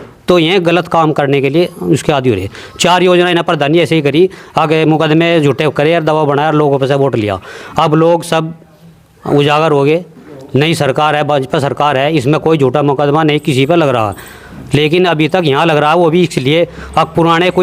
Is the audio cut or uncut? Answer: uncut